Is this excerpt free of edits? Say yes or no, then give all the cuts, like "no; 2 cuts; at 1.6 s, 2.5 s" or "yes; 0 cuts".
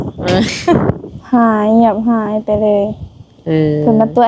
no; 1 cut; at 1.1 s